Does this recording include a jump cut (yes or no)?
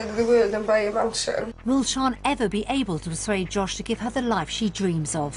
yes